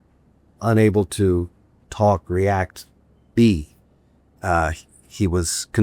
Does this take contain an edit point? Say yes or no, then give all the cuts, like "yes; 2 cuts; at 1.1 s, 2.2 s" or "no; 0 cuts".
yes; 1 cut; at 1.8 s